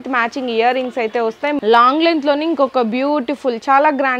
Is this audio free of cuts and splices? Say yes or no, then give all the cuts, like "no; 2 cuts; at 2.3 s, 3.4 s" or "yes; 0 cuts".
no; 1 cut; at 1.6 s